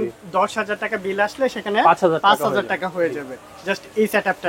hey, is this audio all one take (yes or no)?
yes